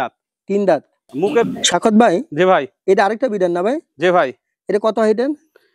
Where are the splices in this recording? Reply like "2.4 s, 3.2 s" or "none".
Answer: 1.5 s